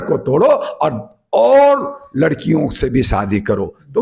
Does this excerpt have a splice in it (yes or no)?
no